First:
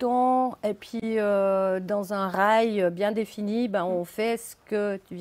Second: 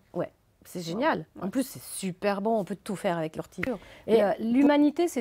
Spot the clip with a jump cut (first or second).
second